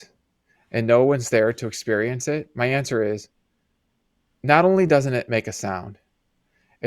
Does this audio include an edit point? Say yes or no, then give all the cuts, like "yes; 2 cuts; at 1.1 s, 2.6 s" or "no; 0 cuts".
no; 0 cuts